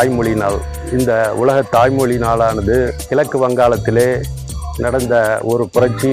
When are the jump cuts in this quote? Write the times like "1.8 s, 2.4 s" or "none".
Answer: none